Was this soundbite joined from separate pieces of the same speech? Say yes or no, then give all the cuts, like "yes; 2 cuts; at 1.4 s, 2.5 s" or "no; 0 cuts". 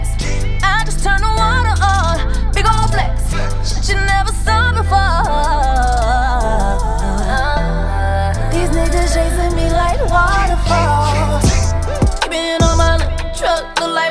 no; 0 cuts